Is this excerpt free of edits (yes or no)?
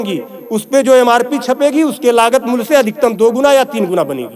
yes